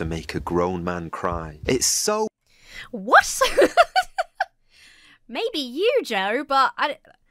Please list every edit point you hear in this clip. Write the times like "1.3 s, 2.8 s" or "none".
none